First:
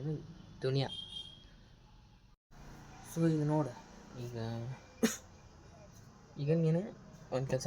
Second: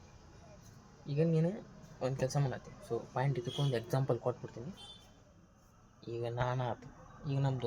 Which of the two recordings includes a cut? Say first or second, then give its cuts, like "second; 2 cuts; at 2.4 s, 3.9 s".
first; 1 cut; at 2.3 s